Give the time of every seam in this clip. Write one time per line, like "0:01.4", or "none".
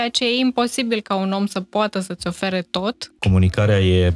0:03.1